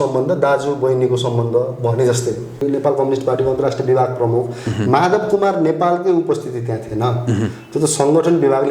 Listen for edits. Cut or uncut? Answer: cut